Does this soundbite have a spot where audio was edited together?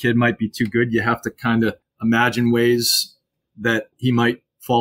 yes; 2 cuts; at 1.9 s, 3.9 s

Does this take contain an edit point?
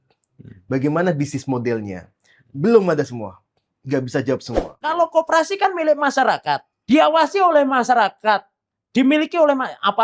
yes; 2 cuts; at 4.8 s, 6.7 s

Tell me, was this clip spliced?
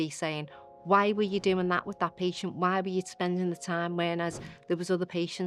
no; 0 cuts

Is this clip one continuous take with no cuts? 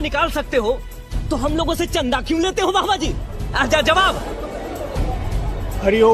yes; 0 cuts

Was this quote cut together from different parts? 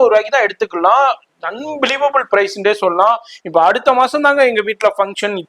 no; 0 cuts

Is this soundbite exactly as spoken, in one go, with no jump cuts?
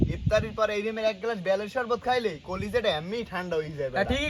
yes; 0 cuts

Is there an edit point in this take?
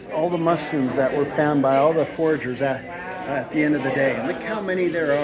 no; 0 cuts

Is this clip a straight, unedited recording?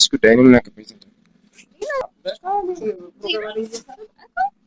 no; 1 cut; at 2.0 s

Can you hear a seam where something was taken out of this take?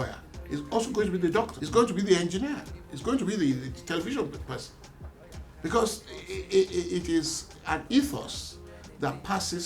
yes; 1 cut; at 1.6 s

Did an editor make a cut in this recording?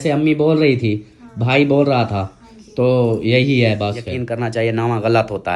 yes; 1 cut; at 4.1 s

